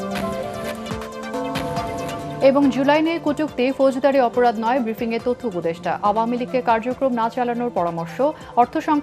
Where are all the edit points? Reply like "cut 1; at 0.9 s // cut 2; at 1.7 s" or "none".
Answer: cut 1; at 2.3 s